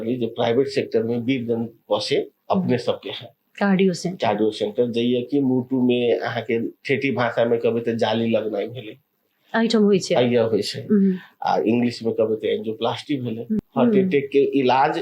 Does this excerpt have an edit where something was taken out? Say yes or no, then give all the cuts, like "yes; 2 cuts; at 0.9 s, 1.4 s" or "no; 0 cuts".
yes; 1 cut; at 13.6 s